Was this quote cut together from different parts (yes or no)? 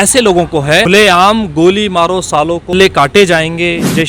yes